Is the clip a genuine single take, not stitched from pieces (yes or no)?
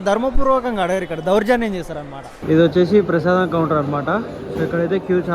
no